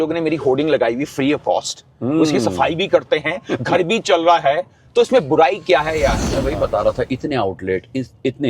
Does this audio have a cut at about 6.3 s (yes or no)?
yes